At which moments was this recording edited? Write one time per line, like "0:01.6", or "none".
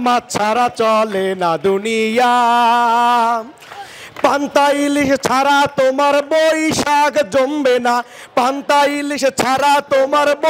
none